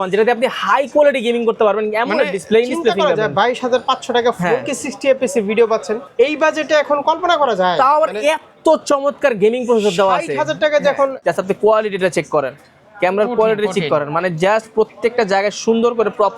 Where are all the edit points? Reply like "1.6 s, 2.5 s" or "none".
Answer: 6.0 s, 11.2 s